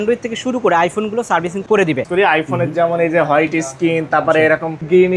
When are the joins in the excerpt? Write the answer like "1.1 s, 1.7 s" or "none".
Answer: 2.0 s